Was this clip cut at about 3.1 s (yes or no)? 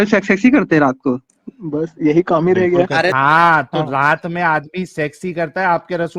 yes